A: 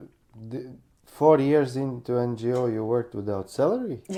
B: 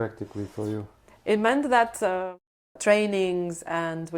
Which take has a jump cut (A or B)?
B